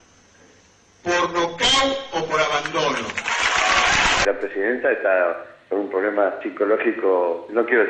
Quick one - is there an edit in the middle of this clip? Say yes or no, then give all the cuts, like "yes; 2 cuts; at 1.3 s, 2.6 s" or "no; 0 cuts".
no; 0 cuts